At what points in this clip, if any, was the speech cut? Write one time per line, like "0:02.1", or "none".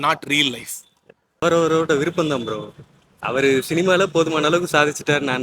0:01.4